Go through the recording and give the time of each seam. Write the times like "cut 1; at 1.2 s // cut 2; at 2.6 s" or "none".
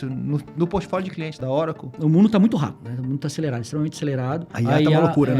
cut 1; at 1.8 s // cut 2; at 2.9 s // cut 3; at 4.5 s